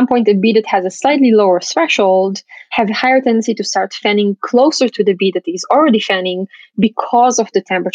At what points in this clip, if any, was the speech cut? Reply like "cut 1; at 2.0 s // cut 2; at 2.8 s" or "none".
none